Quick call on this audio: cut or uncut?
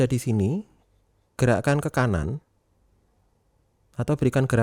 uncut